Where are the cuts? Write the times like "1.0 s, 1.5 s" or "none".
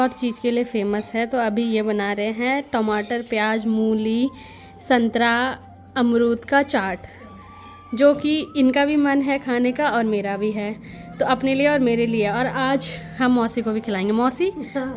none